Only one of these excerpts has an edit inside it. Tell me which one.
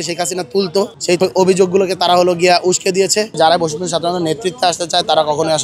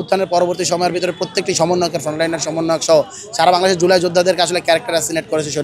first; 2 cuts; at 1.1 s, 3.4 s

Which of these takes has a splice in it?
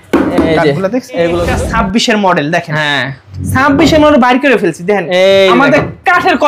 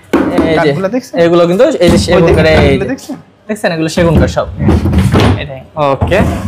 first; 1 cut; at 1.5 s

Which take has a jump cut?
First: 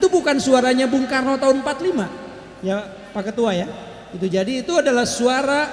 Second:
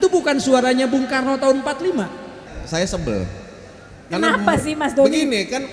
second; 1 cut; at 2.5 s

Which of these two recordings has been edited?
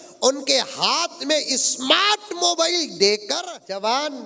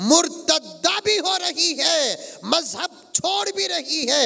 first; 1 cut; at 3.3 s

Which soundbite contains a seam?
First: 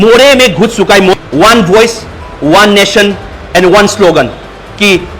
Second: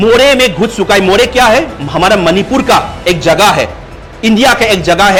first; 1 cut; at 1.1 s

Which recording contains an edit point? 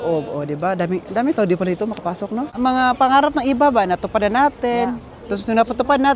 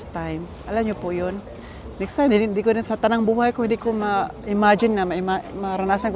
first; 1 cut; at 2.5 s

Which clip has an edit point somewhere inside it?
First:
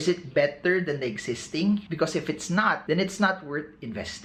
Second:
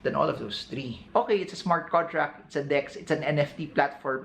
second; 1 cut; at 1.0 s

